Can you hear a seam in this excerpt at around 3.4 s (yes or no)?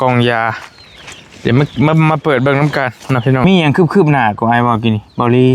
yes